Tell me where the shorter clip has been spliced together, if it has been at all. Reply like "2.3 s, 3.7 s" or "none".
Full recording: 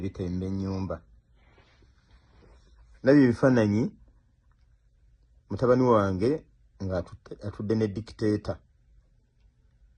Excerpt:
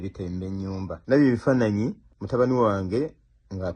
1.0 s, 2.1 s